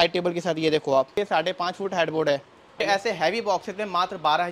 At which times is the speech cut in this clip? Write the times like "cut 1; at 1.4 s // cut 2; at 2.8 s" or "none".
cut 1; at 1.2 s // cut 2; at 2.8 s